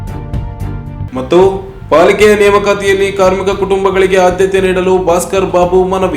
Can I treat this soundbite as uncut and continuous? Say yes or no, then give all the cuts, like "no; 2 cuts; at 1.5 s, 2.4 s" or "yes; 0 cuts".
no; 1 cut; at 1.1 s